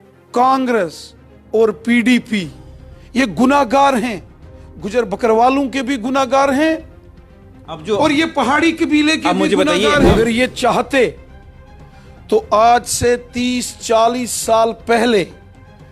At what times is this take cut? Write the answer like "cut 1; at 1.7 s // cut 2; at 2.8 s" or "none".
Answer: cut 1; at 10.1 s